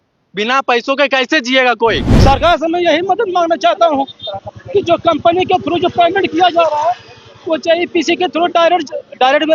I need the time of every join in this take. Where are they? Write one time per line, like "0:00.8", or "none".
0:02.1